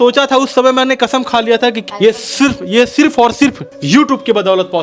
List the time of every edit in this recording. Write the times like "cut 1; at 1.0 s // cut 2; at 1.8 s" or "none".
cut 1; at 1.8 s // cut 2; at 3.7 s